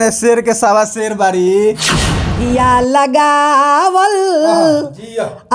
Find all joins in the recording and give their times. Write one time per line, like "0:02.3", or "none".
0:02.3